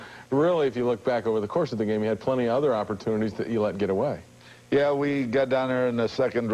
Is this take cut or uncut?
uncut